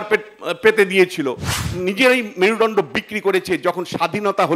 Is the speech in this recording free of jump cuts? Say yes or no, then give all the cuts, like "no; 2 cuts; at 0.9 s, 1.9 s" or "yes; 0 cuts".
no; 1 cut; at 1.4 s